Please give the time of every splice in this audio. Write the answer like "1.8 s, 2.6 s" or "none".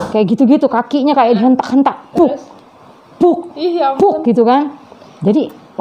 none